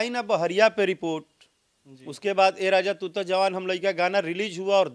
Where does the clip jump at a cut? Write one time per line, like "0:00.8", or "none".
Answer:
none